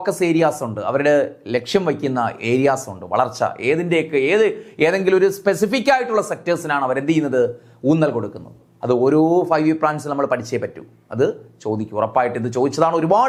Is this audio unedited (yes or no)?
yes